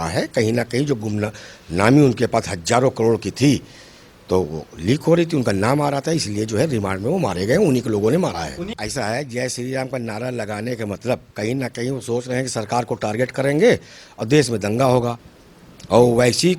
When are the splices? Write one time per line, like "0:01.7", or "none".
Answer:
0:08.6
0:15.3